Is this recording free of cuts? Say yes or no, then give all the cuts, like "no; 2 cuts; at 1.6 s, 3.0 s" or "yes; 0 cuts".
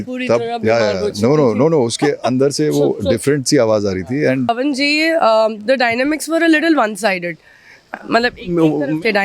no; 1 cut; at 4.5 s